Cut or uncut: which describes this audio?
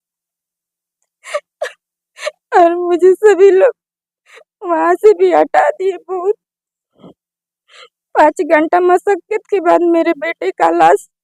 uncut